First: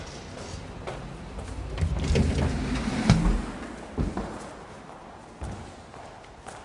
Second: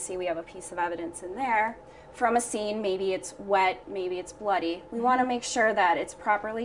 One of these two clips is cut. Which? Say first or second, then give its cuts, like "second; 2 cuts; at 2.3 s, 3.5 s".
second; 1 cut; at 5.5 s